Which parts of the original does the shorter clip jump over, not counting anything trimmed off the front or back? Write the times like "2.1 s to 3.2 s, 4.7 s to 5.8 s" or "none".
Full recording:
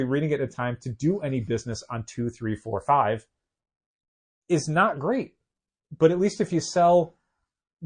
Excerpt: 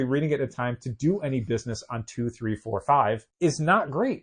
3.3 s to 4.4 s